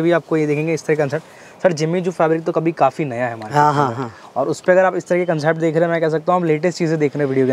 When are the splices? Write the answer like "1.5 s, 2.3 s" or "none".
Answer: none